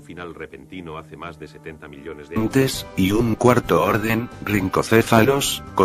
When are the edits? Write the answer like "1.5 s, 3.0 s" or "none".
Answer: none

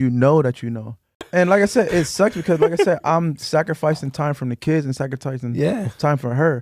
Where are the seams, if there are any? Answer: 1.2 s

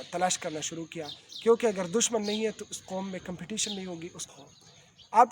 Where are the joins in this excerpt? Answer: 4.3 s

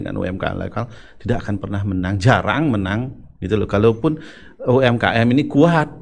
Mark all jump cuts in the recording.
none

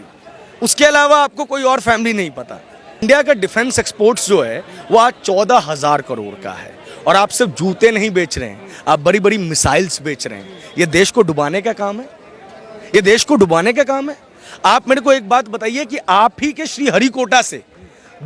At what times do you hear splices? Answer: 3.0 s

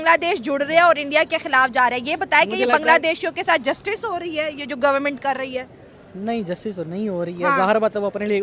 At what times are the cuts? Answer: none

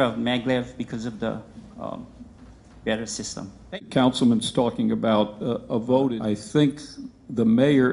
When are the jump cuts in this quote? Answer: 6.2 s

